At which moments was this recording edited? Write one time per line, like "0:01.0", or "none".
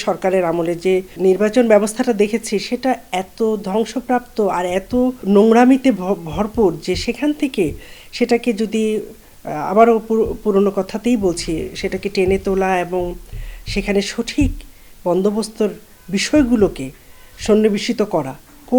0:01.1
0:05.2